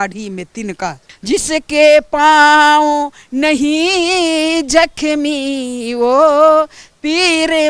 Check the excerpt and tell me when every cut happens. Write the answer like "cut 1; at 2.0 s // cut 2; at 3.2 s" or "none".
cut 1; at 1.1 s

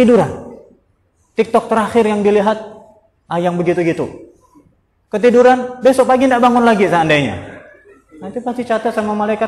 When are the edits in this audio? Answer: none

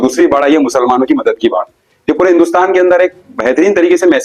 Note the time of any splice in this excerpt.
none

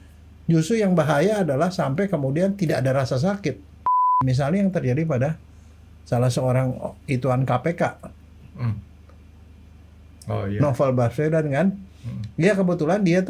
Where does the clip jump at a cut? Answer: cut 1; at 4.2 s

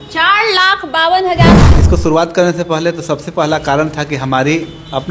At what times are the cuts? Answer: cut 1; at 1.6 s

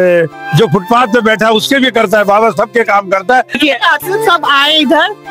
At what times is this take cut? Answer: cut 1; at 3.6 s

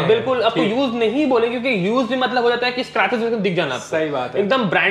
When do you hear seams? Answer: none

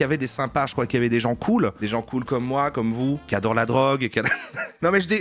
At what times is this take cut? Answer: cut 1; at 3.2 s

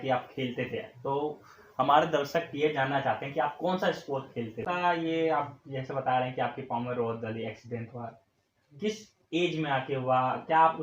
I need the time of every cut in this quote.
cut 1; at 4.6 s

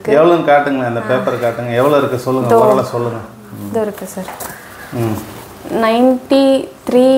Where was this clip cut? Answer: none

